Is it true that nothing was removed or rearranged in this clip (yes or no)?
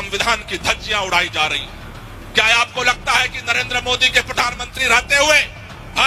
yes